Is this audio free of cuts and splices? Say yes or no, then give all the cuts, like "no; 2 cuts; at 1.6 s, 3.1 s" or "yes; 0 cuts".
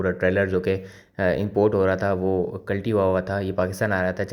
yes; 0 cuts